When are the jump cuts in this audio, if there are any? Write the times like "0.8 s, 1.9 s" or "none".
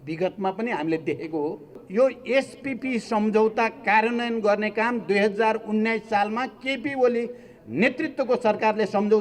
1.8 s